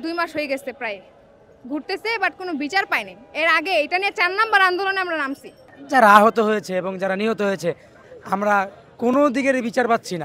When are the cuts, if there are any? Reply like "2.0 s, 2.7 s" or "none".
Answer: none